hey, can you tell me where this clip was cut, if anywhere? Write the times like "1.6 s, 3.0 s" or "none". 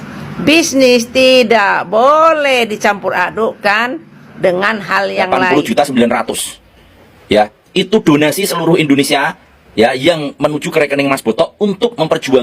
5.4 s